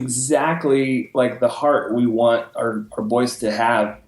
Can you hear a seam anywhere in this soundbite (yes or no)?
no